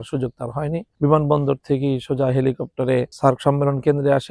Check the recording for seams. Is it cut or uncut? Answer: uncut